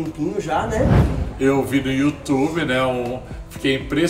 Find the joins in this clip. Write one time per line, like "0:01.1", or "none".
0:01.1